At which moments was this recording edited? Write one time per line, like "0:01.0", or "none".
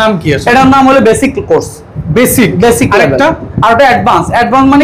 none

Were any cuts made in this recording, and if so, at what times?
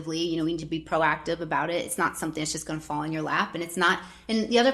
none

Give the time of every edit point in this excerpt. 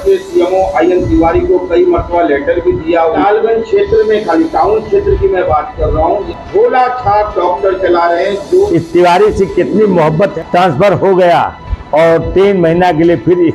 0:03.2
0:06.3
0:08.7
0:10.3

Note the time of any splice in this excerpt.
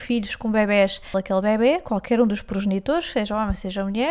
0:01.2

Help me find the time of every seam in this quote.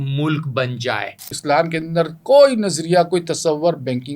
0:01.3

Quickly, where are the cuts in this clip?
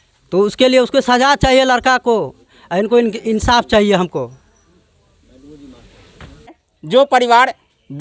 none

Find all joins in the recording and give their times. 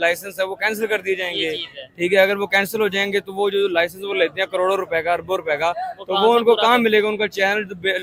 none

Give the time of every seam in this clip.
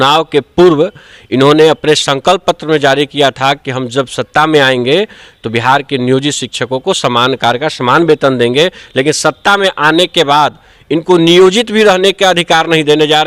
none

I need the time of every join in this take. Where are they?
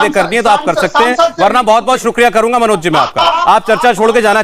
0:03.3

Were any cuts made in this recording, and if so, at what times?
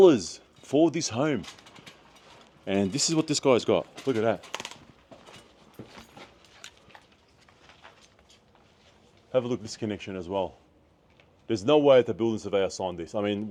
none

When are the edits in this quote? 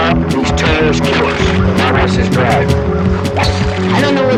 none

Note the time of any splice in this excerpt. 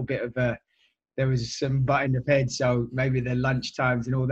none

